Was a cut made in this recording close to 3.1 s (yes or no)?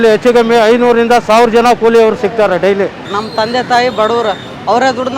yes